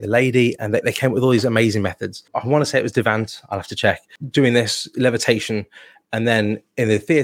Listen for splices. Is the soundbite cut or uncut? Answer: cut